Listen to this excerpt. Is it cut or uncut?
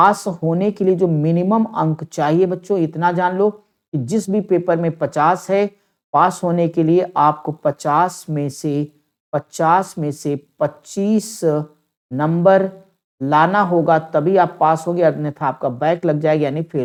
uncut